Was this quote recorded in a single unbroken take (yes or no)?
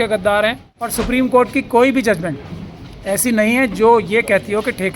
no